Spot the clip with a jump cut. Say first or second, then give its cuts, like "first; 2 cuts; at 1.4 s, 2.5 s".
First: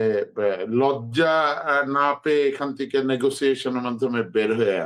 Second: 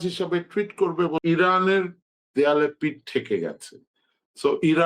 second; 1 cut; at 1.2 s